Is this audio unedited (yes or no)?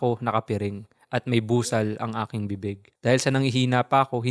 no